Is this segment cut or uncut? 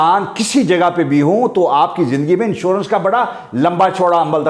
uncut